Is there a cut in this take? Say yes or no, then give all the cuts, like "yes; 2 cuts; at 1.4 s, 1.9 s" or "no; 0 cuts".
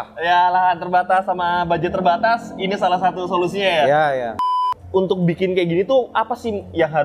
yes; 1 cut; at 4.7 s